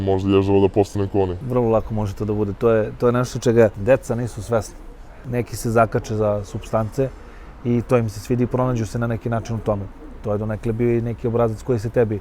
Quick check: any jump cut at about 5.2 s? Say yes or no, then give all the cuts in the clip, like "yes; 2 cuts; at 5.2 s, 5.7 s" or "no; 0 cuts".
yes; 2 cuts; at 1.4 s, 5.2 s